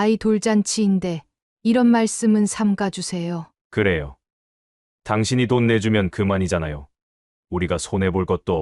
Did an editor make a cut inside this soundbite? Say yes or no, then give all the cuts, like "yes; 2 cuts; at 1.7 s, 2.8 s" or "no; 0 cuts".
no; 0 cuts